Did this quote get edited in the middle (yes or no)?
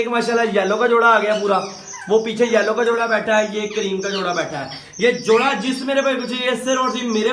no